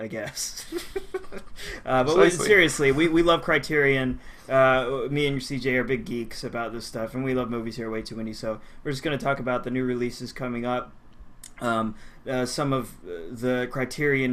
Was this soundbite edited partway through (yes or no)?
yes